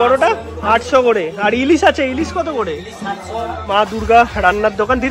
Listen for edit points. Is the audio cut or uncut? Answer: cut